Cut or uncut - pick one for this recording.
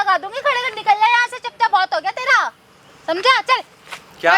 uncut